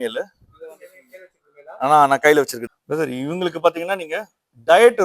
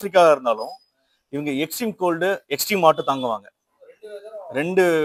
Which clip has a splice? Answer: first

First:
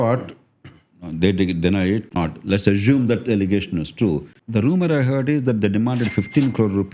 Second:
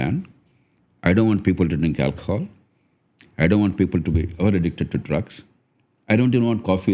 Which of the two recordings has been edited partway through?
first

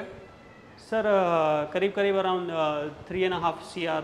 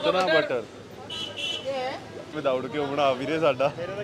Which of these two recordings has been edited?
second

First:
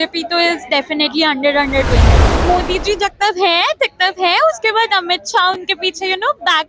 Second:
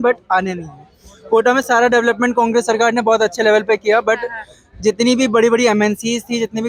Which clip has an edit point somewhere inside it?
first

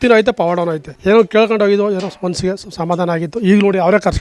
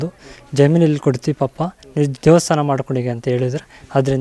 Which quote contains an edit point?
first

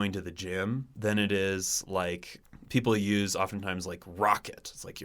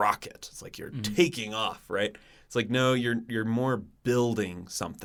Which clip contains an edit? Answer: first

